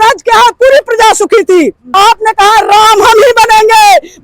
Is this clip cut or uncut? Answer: cut